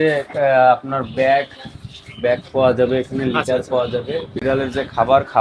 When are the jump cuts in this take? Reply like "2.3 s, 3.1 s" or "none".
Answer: none